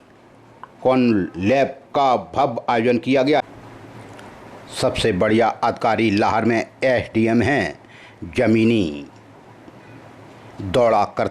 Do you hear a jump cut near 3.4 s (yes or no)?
yes